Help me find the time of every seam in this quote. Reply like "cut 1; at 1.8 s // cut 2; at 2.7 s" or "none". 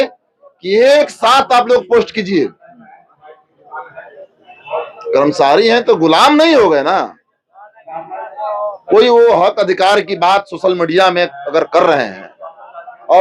none